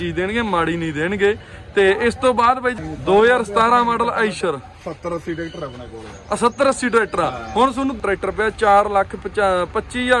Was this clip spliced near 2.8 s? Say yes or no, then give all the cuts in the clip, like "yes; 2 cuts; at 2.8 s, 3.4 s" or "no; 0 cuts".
yes; 2 cuts; at 2.8 s, 8.0 s